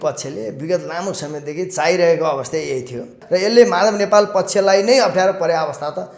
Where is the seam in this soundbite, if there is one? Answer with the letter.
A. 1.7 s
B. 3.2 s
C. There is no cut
B